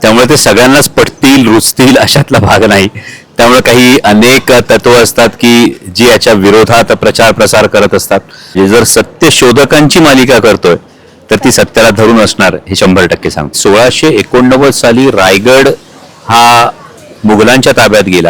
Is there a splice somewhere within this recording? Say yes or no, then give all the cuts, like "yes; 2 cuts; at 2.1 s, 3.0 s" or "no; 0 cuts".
yes; 2 cuts; at 8.6 s, 13.6 s